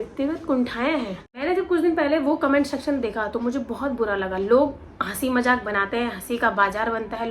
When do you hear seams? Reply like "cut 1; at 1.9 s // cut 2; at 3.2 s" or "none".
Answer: cut 1; at 1.2 s